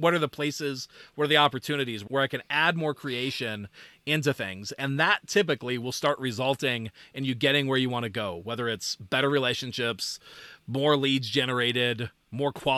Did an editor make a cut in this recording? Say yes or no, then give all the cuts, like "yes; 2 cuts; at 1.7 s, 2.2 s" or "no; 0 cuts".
no; 0 cuts